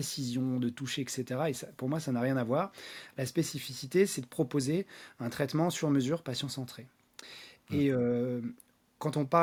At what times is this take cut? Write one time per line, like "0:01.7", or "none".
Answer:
none